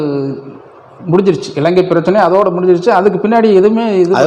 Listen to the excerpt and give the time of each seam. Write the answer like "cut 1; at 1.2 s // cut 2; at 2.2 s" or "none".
none